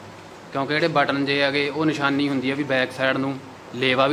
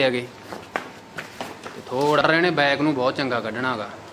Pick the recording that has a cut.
second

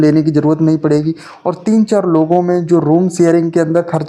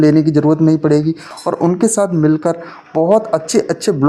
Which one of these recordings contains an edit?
second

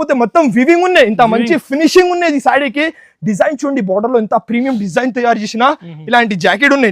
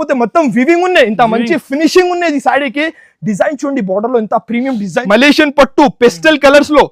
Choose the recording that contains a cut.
second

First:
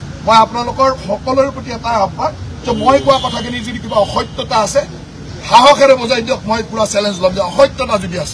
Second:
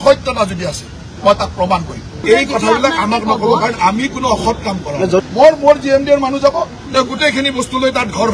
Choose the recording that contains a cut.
second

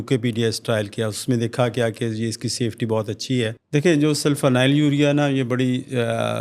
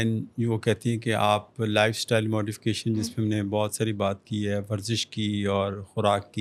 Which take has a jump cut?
first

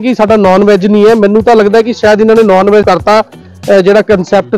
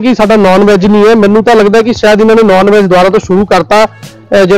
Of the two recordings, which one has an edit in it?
first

